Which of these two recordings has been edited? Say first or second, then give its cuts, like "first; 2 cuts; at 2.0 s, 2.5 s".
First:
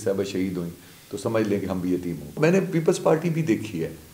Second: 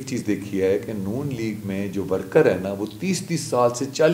first; 1 cut; at 2.4 s